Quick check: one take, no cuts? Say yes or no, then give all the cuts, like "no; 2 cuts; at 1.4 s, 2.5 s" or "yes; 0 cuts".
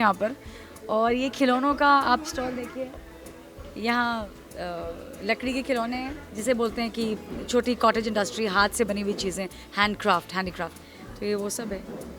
yes; 0 cuts